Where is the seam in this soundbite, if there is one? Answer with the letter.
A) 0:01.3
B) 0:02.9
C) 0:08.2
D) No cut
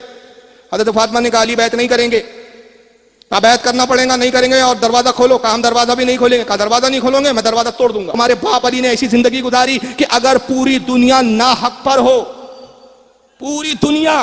C